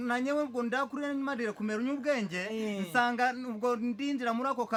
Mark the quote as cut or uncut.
uncut